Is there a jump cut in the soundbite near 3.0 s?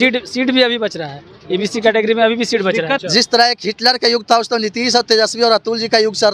yes; 1 cut; at 3.0 s

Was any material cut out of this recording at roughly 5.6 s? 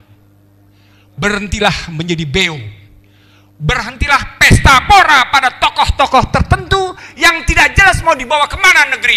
no; 0 cuts

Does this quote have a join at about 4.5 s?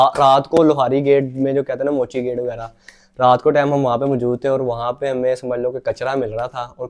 no; 0 cuts

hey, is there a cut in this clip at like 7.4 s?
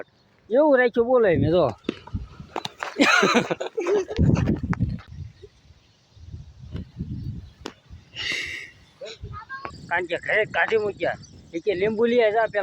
no; 3 cuts; at 1.8 s, 5.1 s, 9.6 s

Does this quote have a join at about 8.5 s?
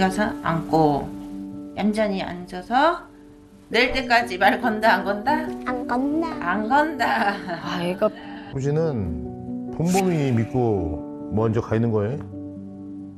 yes; 1 cut; at 8.5 s

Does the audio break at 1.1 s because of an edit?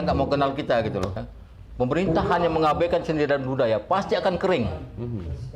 yes; 1 cut; at 1.1 s

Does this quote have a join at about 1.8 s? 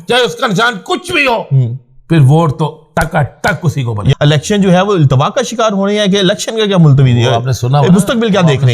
no; 1 cut; at 4.1 s

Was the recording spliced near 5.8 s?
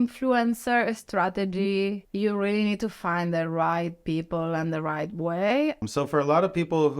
yes; 2 cuts; at 2.0 s, 5.8 s

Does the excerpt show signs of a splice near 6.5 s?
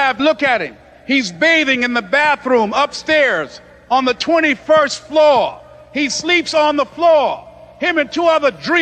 no; 0 cuts

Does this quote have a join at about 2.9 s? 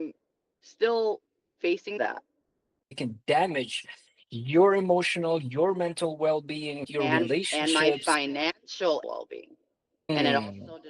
yes; 2 cuts; at 2.9 s, 9.0 s

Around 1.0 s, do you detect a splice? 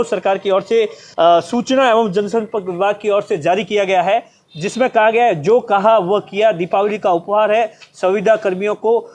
yes; 1 cut; at 1.0 s

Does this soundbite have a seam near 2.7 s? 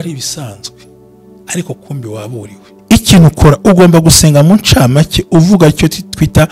yes; 1 cut; at 2.7 s

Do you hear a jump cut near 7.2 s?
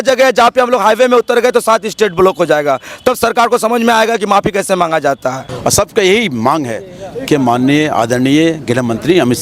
no; 1 cut; at 5.4 s

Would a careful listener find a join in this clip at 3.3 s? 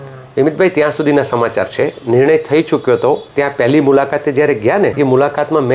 yes; 2 cuts; at 3.3 s, 4.9 s

